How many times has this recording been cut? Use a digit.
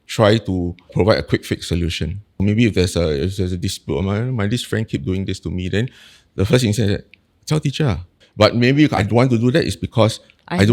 3